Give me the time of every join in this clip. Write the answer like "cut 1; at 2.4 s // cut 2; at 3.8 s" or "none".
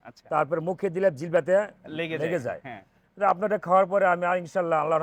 none